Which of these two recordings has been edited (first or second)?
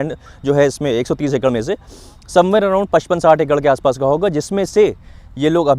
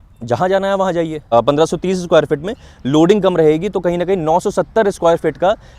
second